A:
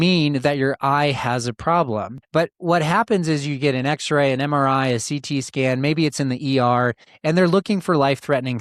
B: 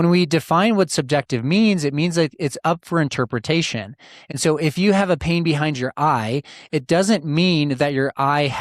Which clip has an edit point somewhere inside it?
A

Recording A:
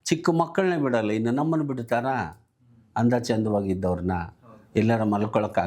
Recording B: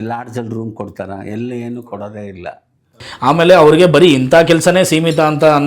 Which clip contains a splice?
B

